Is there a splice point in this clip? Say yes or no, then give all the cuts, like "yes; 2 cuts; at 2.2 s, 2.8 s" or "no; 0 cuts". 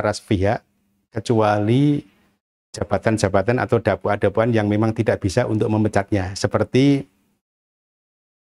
no; 0 cuts